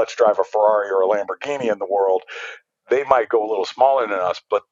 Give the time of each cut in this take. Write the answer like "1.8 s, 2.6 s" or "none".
none